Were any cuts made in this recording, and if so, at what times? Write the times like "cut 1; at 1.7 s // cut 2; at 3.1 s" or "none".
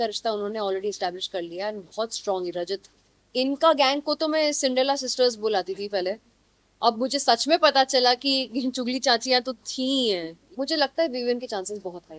cut 1; at 3.3 s // cut 2; at 10.4 s

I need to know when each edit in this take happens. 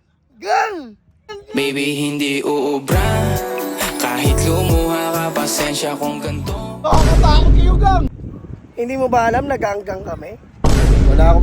cut 1; at 1.4 s // cut 2; at 8.2 s

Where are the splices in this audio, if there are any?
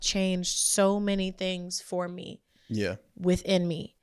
none

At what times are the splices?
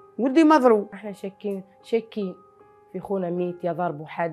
none

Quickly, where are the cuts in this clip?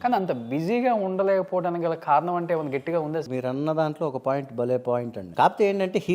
cut 1; at 3.3 s // cut 2; at 5.2 s

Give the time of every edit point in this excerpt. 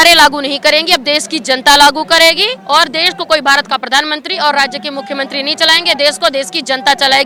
none

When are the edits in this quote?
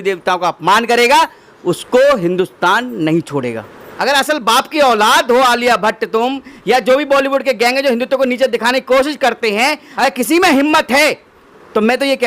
cut 1; at 3.9 s // cut 2; at 9.9 s

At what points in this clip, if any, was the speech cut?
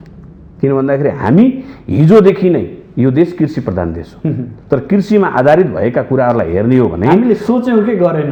none

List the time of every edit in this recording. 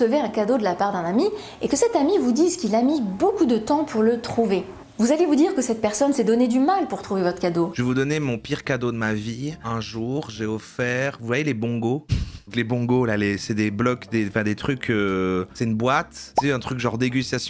cut 1; at 15.5 s

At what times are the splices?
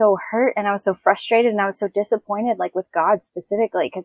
none

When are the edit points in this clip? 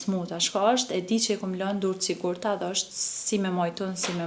none

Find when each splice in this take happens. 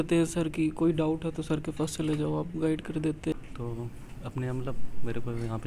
cut 1; at 3.3 s

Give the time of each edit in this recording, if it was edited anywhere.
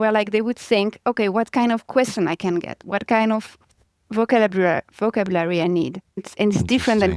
none

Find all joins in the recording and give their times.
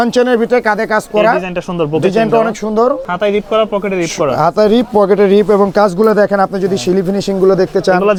none

